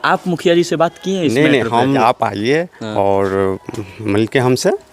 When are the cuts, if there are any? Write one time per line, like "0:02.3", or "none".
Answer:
0:02.0